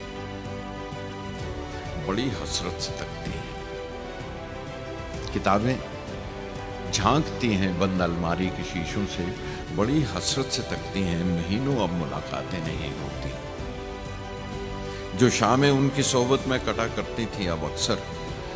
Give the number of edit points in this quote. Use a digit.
0